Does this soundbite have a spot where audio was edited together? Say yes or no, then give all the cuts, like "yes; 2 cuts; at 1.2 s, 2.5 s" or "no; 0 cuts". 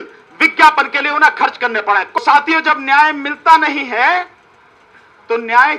yes; 1 cut; at 2.2 s